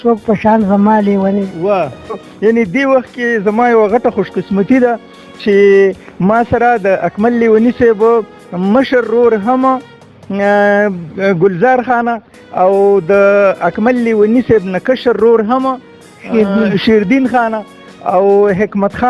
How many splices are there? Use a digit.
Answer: 1